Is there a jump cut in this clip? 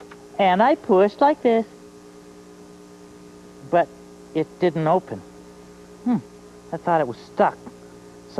no; 0 cuts

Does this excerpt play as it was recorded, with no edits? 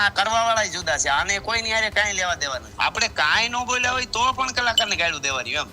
no; 1 cut; at 2.7 s

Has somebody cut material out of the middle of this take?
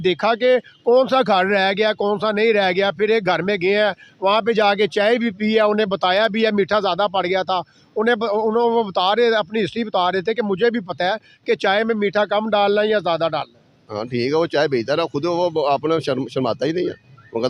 no; 0 cuts

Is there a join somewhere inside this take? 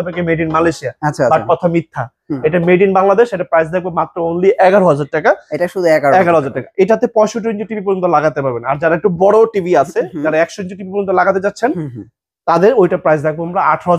no; 0 cuts

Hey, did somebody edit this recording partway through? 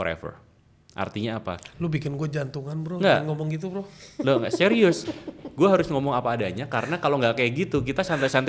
no; 0 cuts

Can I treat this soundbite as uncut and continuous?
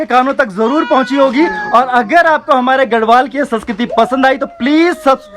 yes; 0 cuts

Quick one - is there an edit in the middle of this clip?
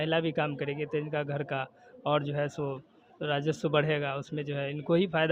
no; 0 cuts

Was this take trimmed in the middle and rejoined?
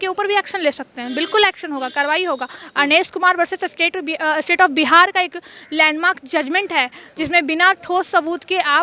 no; 0 cuts

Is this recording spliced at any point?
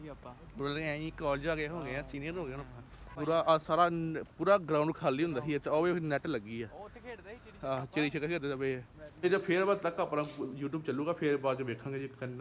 yes; 2 cuts; at 3.2 s, 9.2 s

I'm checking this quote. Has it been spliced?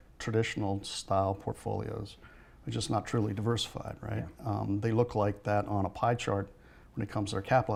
no; 0 cuts

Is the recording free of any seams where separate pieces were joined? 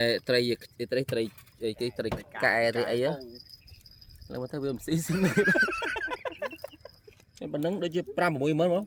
yes; 0 cuts

